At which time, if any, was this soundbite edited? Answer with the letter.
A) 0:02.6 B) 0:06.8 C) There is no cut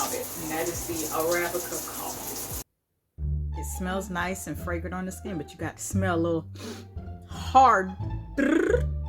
A